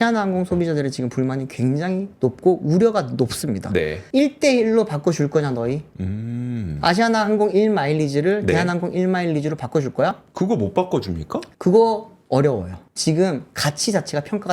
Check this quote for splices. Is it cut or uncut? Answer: uncut